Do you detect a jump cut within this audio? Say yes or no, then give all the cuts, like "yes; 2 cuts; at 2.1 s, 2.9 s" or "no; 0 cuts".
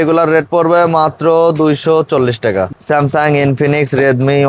yes; 1 cut; at 2.7 s